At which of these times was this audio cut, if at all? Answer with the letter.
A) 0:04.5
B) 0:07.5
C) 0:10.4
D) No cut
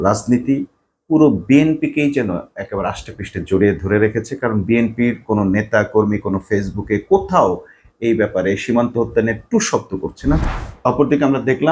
C